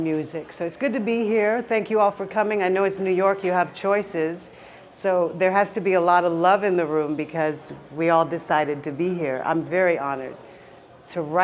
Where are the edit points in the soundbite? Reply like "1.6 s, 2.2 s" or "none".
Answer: 3.3 s